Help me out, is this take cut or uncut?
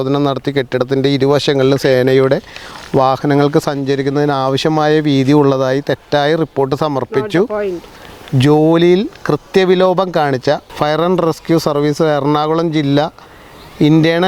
uncut